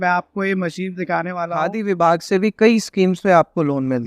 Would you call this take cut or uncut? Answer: cut